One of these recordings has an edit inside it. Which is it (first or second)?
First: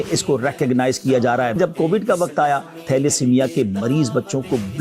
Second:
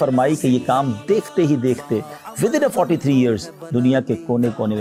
first